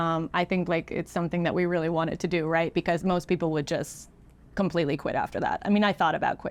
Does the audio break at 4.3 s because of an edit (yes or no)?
no